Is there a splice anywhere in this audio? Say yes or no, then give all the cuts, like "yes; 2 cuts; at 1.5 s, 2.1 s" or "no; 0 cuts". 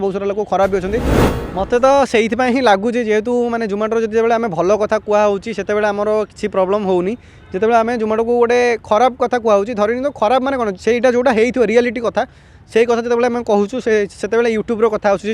yes; 1 cut; at 1.2 s